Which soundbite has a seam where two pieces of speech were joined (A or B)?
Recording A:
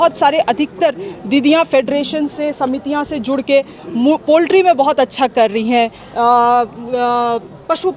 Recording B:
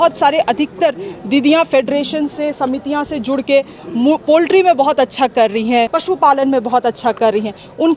B